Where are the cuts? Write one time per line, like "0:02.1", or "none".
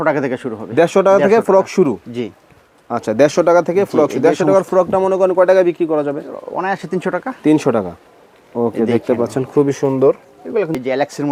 none